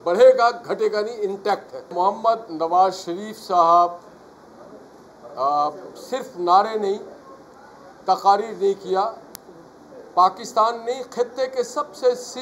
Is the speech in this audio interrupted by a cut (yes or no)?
yes